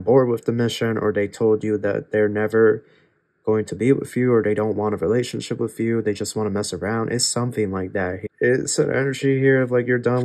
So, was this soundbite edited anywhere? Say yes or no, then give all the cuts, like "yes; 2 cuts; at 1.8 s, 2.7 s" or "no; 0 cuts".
yes; 1 cut; at 8.2 s